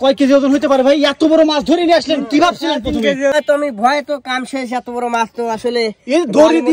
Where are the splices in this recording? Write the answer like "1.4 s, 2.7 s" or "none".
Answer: 3.3 s